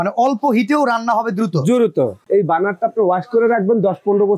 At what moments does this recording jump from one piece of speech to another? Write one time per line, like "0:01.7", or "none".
0:02.2